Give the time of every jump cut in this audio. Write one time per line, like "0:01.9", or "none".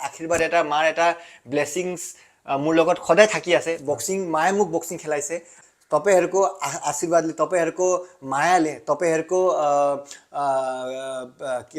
0:05.6